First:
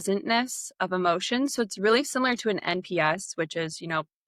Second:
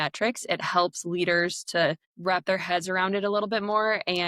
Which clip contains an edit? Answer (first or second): second